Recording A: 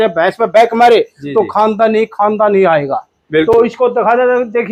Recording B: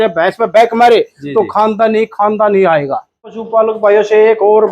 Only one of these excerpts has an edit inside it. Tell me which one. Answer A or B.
B